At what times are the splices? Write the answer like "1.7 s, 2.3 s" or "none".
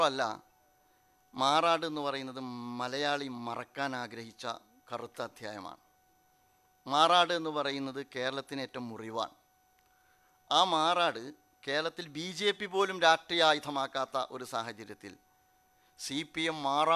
none